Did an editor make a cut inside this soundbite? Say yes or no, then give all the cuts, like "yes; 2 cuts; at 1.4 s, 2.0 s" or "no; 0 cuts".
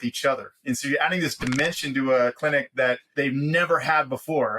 yes; 1 cut; at 2.7 s